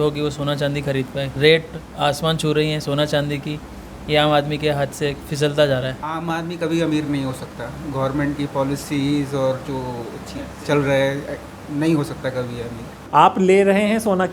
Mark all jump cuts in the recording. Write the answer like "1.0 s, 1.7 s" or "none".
1.3 s, 6.0 s, 13.0 s